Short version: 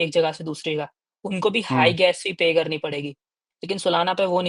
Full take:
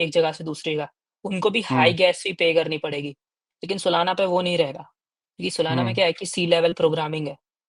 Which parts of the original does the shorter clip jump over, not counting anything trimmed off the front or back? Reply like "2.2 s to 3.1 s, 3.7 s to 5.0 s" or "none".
none